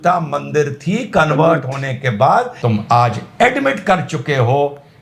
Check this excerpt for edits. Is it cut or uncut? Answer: cut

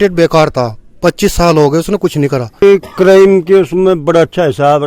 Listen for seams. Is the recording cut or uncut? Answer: cut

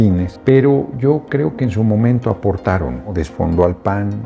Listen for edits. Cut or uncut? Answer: cut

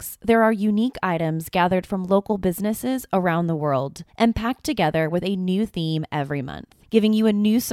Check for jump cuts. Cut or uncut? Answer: cut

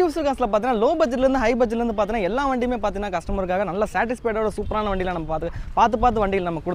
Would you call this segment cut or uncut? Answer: uncut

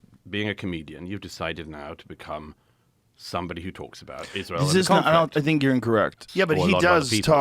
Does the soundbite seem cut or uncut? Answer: cut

